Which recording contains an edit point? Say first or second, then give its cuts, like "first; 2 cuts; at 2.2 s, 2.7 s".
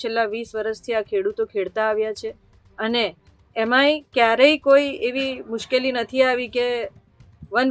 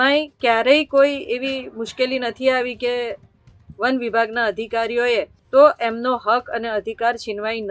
second; 1 cut; at 5.4 s